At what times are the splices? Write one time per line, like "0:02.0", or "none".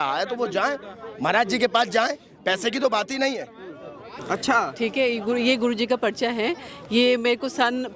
0:04.1